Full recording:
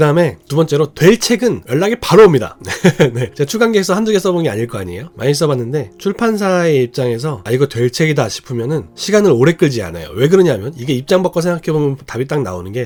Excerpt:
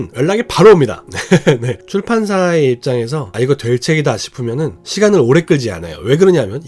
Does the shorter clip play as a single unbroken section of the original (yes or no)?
no